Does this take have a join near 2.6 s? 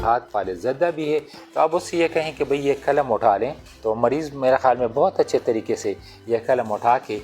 no; 1 cut; at 1.4 s

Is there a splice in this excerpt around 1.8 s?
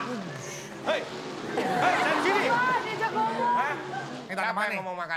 no; 1 cut; at 4.2 s

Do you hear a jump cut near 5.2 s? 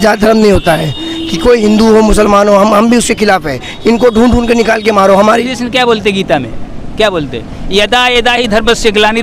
yes; 1 cut; at 5.2 s

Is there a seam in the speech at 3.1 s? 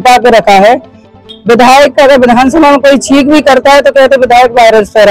no; 1 cut; at 1.1 s

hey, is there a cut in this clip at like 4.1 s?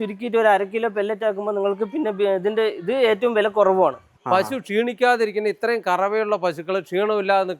yes; 1 cut; at 4.1 s

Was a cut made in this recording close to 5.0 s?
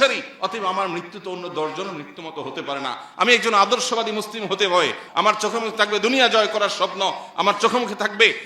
yes; 1 cut; at 5.0 s

